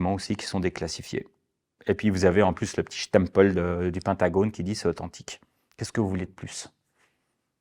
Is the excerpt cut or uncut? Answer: uncut